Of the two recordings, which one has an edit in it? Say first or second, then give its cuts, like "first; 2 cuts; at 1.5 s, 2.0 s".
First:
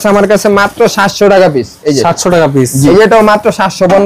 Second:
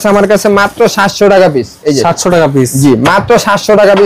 first; 1 cut; at 2.9 s